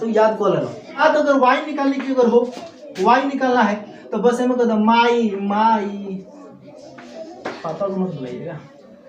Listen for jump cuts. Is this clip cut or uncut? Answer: cut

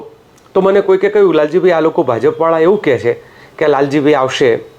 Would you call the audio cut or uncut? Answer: uncut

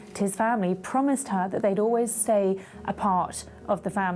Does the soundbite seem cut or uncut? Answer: uncut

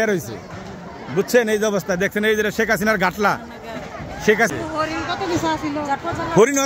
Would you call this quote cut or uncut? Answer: cut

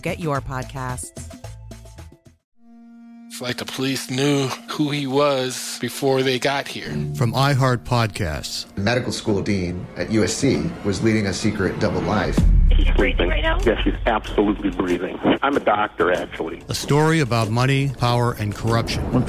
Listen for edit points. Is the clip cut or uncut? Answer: cut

